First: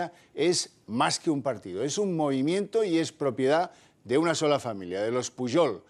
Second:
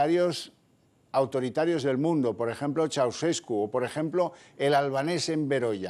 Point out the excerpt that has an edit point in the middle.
second; 1 cut; at 2.8 s

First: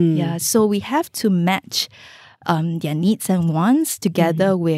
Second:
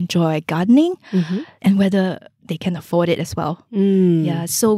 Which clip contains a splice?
second; 1 cut; at 1.5 s

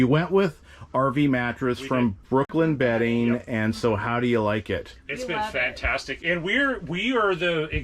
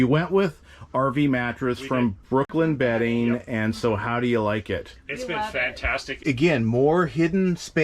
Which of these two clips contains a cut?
second; 1 cut; at 6.1 s

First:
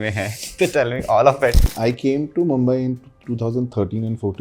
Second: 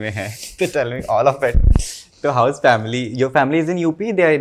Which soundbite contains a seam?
first; 1 cut; at 1.7 s

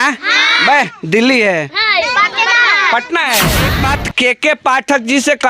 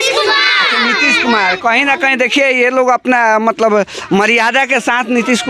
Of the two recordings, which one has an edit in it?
first; 1 cut; at 3.7 s

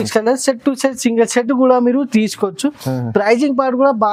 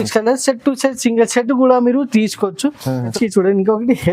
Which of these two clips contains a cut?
second; 1 cut; at 3.1 s

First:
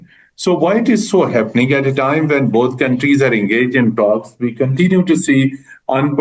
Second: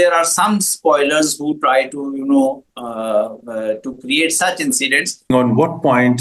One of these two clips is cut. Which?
second; 1 cut; at 5.3 s

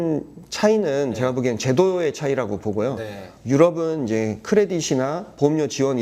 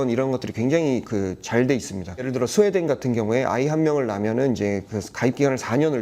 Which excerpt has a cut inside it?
second; 1 cut; at 2.2 s

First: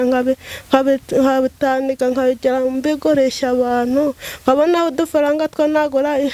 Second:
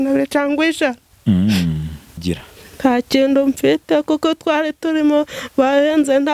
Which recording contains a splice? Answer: second; 1 cut; at 2.2 s

